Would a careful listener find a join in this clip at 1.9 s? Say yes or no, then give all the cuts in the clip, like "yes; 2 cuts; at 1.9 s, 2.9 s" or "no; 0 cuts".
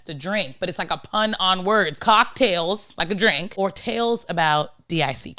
yes; 2 cuts; at 1.9 s, 3.5 s